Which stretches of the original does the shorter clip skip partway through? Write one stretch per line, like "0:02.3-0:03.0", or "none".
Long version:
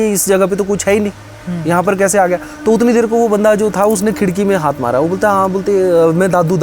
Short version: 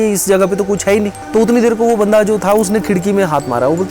0:01.2-0:02.5